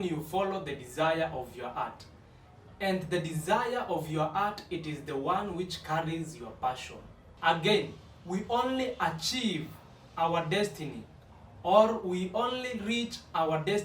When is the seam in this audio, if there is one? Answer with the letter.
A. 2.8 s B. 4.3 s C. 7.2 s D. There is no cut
C